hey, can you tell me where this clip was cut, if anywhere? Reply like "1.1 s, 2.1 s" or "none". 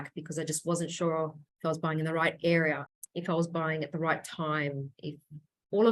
1.4 s, 2.9 s